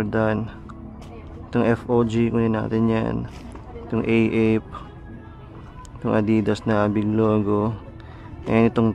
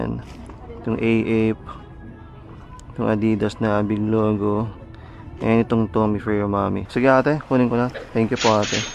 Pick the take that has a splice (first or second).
second